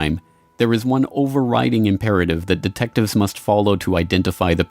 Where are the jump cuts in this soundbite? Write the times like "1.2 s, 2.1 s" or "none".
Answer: 2.9 s